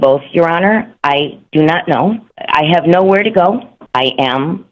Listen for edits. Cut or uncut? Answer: cut